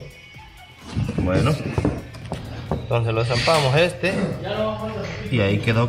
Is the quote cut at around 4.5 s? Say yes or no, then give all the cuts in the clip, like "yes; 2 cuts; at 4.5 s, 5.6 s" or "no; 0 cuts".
no; 1 cut; at 2.1 s